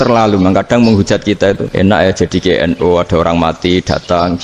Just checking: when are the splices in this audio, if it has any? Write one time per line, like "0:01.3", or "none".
0:01.7

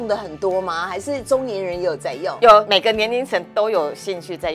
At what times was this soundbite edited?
0:02.7

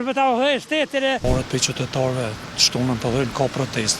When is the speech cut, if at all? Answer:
0:01.2

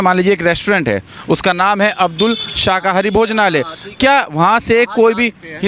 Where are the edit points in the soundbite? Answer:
none

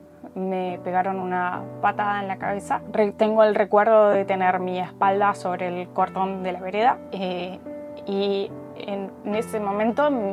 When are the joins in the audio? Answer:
none

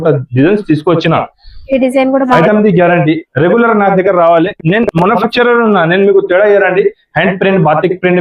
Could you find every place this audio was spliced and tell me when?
0:02.3

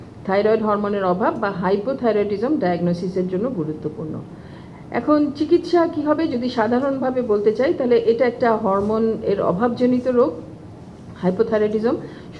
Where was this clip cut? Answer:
none

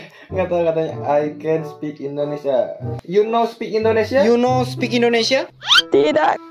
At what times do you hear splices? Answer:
0:02.8

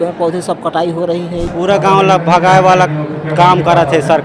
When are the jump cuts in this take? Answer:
0:01.5

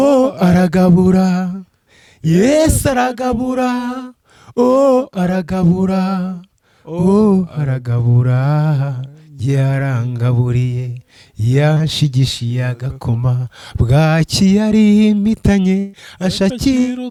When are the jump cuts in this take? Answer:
none

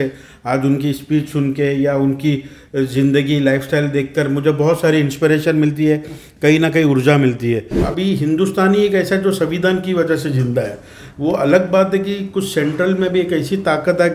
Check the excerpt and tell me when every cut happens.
0:07.8

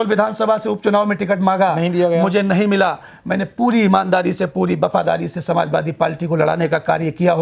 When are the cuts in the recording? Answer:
none

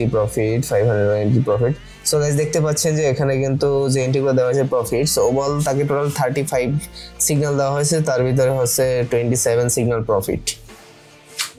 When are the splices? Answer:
none

